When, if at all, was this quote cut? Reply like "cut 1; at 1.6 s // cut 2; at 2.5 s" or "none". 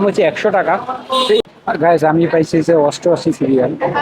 cut 1; at 1.4 s